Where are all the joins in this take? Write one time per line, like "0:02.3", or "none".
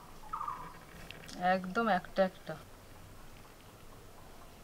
0:01.1
0:02.4